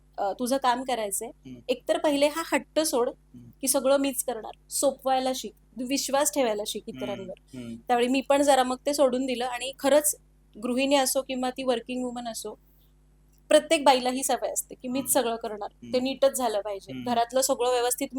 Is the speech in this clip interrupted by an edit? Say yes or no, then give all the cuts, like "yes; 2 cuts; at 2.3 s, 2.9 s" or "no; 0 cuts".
no; 0 cuts